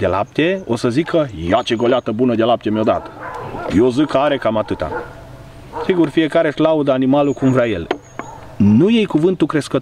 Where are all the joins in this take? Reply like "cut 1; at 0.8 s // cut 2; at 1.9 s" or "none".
cut 1; at 7.8 s